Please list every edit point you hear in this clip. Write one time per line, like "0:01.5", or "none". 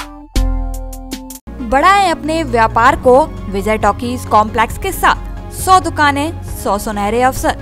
none